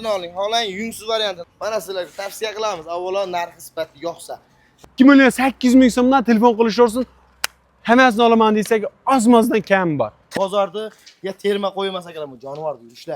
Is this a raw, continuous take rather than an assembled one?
no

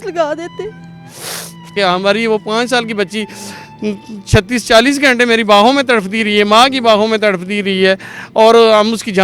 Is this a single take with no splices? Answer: no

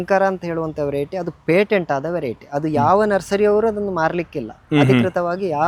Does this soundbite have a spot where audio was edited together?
no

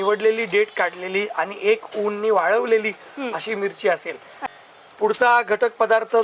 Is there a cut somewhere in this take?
no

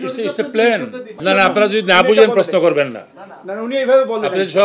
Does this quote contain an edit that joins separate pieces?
yes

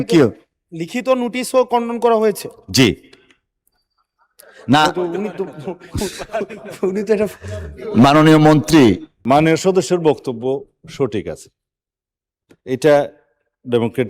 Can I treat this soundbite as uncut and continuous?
no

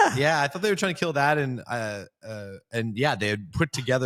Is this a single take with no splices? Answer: yes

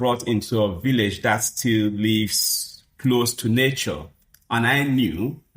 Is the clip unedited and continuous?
yes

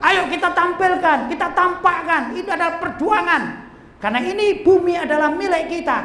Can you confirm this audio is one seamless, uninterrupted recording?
yes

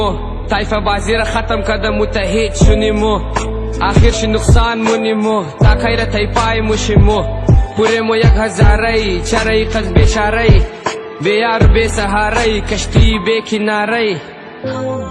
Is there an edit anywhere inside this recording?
no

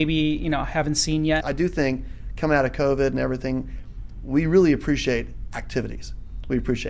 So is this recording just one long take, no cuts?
no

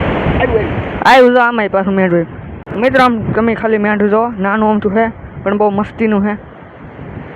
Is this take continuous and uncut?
no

